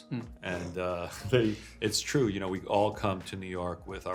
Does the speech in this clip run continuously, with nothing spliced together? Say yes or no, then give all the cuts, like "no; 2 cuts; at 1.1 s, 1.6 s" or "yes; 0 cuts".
yes; 0 cuts